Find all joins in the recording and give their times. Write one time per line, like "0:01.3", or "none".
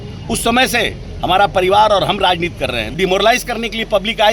0:02.9